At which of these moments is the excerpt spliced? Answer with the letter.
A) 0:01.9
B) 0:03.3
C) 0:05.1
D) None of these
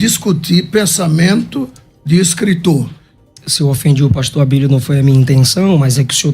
B